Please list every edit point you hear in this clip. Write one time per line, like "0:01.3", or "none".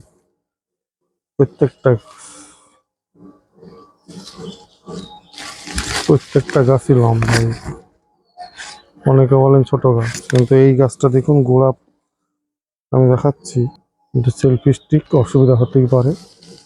0:13.4